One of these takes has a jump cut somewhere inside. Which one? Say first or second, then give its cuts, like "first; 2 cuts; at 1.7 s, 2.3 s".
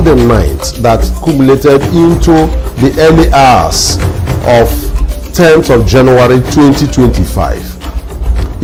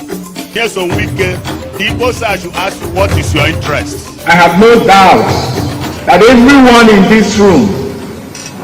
second; 1 cut; at 1.1 s